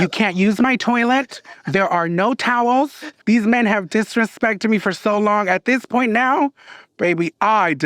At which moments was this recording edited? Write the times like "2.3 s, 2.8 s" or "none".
3.1 s